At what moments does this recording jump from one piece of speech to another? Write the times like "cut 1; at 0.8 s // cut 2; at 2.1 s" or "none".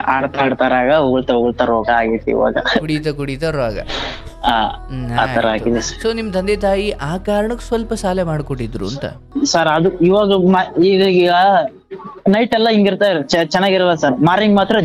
cut 1; at 9.1 s

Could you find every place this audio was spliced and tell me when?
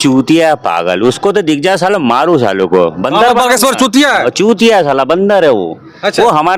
none

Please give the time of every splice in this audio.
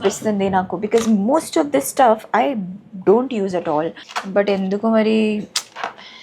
none

